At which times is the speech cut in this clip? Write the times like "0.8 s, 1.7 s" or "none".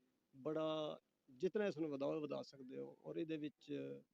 none